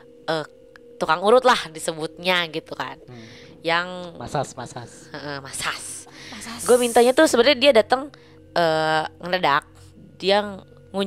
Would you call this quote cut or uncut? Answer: uncut